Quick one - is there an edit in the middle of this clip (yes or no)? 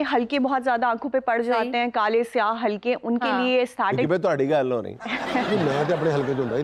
no